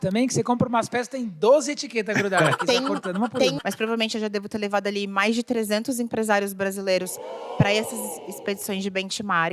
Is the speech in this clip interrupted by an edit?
yes; 1 cut; at 3.6 s

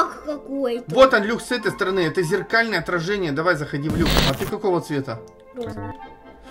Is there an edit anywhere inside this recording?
yes; 1 cut; at 4.2 s

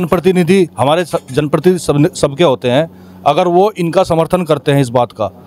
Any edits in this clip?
no; 0 cuts

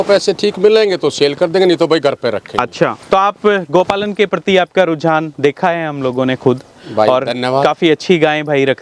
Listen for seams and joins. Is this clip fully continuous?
yes; 0 cuts

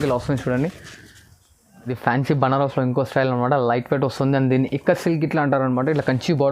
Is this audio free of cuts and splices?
no; 1 cut; at 1.9 s

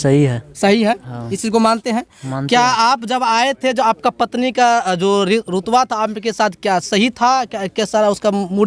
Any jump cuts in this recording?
no; 0 cuts

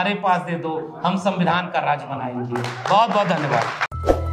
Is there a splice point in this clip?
no; 0 cuts

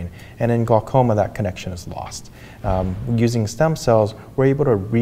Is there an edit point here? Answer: no; 0 cuts

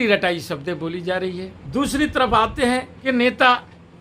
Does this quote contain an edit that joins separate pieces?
yes; 2 cuts; at 1.6 s, 2.9 s

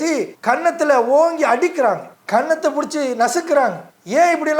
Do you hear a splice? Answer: no; 0 cuts

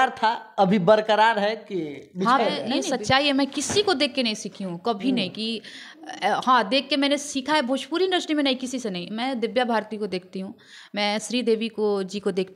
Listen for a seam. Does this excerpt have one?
yes; 1 cut; at 2.8 s

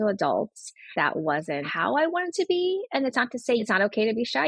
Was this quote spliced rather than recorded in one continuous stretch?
yes; 3 cuts; at 0.9 s, 1.7 s, 3.6 s

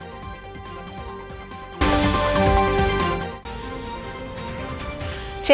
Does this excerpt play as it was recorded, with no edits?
no; 1 cut; at 1.8 s

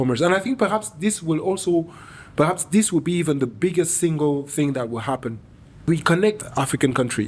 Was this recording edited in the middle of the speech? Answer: yes; 2 cuts; at 5.8 s, 6.4 s

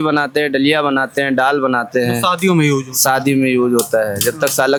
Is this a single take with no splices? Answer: yes; 0 cuts

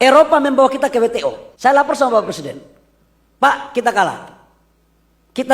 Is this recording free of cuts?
no; 1 cut; at 1.5 s

